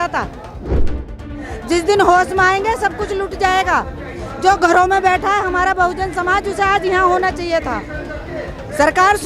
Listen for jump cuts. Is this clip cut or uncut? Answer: cut